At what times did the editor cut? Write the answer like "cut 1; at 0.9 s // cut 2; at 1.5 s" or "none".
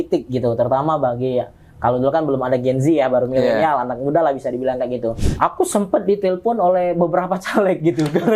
cut 1; at 5.2 s